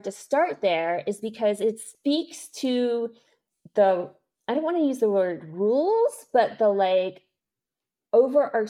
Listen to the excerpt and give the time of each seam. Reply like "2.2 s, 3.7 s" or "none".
none